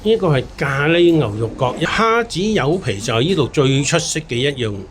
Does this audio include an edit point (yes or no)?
yes